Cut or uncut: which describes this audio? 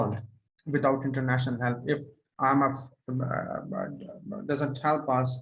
uncut